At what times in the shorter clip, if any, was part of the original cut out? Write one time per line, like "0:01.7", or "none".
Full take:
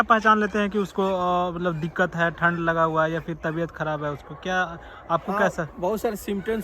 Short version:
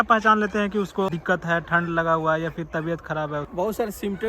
0:01.1
0:03.5